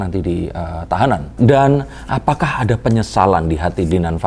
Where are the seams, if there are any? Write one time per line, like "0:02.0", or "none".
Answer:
none